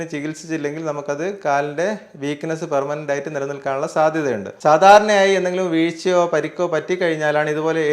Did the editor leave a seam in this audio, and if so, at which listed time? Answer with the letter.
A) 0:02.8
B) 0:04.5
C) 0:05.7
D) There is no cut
B